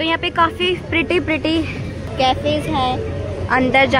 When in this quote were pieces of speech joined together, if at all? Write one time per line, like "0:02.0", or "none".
0:02.1